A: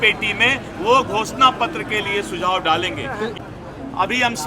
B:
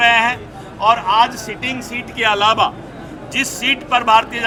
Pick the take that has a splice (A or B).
A